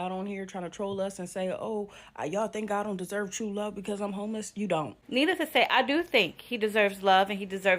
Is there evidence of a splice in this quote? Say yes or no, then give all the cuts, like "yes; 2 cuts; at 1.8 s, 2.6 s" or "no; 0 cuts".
yes; 1 cut; at 5.0 s